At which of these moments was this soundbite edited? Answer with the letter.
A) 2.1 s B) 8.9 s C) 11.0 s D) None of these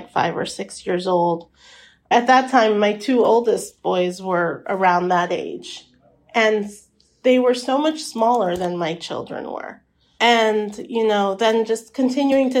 A